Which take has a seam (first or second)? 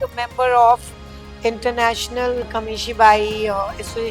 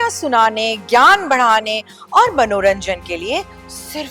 first